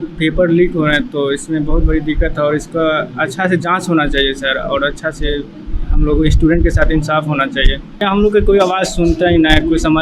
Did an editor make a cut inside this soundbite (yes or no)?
yes